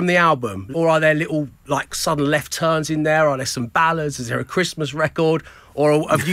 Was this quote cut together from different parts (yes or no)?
no